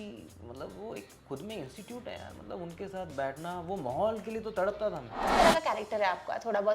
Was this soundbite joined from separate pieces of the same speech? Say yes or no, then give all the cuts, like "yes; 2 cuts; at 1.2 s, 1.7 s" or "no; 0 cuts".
yes; 1 cut; at 5.3 s